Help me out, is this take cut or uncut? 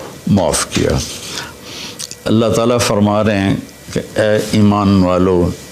cut